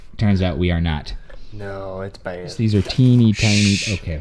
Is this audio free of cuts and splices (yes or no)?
no